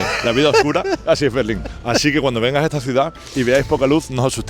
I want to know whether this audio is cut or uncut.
uncut